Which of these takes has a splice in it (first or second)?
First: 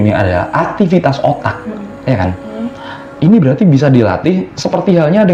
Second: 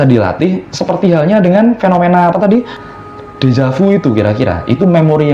second